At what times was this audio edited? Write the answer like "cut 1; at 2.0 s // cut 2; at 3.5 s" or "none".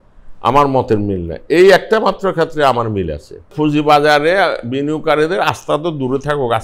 cut 1; at 3.5 s